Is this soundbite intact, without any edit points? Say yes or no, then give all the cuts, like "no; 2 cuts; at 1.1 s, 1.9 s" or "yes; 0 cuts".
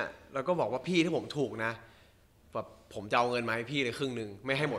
yes; 0 cuts